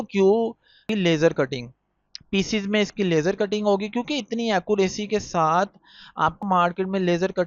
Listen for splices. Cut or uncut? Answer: cut